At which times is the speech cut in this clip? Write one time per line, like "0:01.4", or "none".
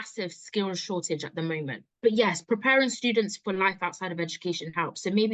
0:01.8